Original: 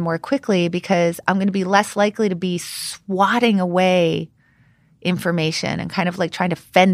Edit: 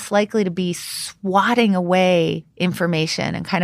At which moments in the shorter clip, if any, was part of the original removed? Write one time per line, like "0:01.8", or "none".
0:02.5